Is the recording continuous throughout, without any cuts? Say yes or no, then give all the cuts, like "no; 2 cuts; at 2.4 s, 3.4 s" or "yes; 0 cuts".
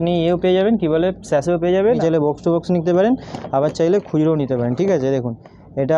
no; 1 cut; at 2.0 s